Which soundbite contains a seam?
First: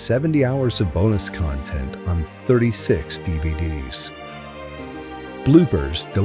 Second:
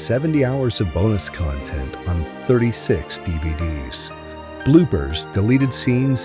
second; 1 cut; at 4.6 s

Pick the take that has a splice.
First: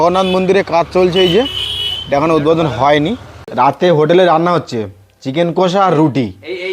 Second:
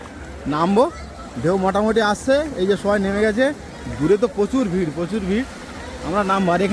first; 1 cut; at 3.4 s

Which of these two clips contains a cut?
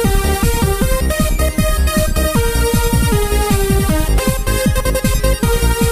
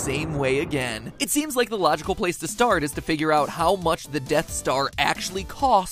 first; 1 cut; at 3.8 s

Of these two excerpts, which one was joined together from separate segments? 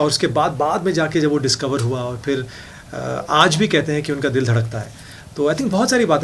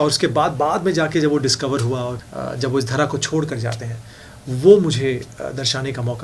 second; 1 cut; at 2.2 s

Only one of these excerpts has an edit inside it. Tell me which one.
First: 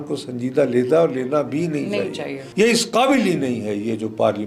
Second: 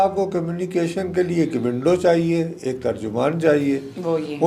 first; 1 cut; at 2.4 s

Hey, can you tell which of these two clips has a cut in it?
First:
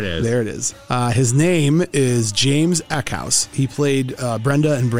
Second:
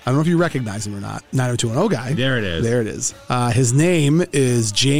second; 1 cut; at 1.1 s

